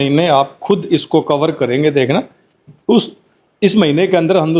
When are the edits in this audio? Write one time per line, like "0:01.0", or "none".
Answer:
none